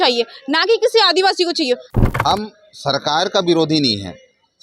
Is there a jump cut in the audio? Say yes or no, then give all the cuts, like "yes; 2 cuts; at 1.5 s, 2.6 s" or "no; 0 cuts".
yes; 1 cut; at 1.9 s